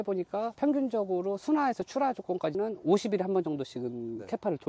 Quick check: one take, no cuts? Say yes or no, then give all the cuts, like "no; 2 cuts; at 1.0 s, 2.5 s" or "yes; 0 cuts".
yes; 0 cuts